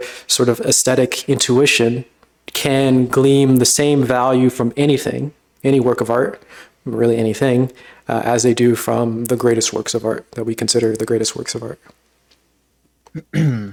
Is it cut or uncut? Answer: uncut